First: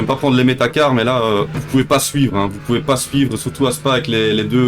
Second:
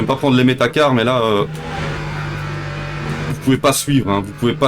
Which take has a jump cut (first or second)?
first